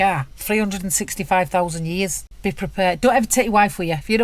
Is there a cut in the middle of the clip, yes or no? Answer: yes